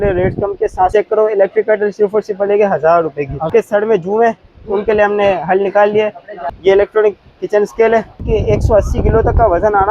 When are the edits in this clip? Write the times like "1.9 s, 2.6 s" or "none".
0.9 s, 3.5 s, 6.4 s, 8.2 s